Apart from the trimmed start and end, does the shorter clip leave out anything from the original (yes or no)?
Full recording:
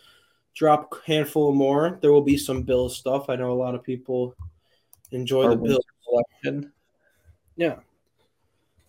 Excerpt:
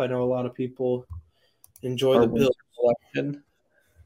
no